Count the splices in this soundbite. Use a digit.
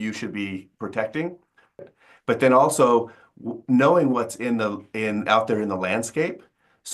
1